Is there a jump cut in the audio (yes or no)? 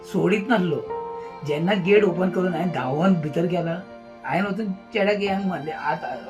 yes